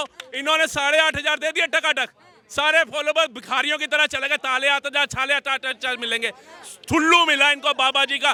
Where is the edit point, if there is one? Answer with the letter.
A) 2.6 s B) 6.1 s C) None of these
C